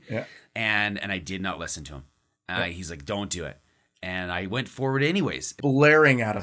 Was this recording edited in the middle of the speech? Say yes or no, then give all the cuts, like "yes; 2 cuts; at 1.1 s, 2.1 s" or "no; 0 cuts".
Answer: yes; 1 cut; at 5.5 s